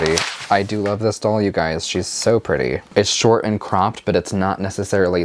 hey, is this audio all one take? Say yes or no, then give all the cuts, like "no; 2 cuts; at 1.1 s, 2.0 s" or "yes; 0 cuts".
no; 1 cut; at 2.8 s